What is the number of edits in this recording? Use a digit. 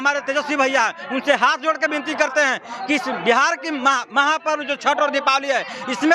0